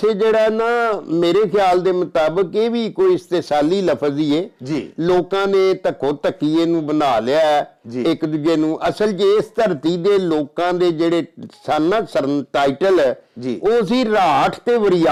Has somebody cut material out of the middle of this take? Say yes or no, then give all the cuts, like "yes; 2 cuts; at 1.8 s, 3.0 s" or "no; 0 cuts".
no; 0 cuts